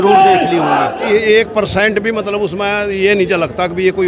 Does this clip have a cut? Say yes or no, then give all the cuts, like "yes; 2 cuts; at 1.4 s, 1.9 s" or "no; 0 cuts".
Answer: yes; 1 cut; at 1.1 s